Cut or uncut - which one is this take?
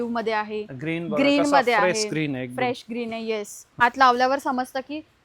cut